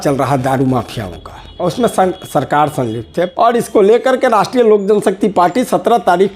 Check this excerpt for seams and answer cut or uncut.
cut